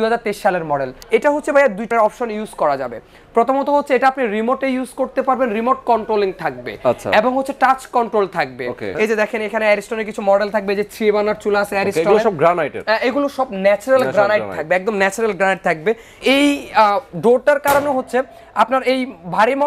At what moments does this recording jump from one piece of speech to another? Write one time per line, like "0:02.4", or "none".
0:00.9
0:01.9
0:08.9
0:16.2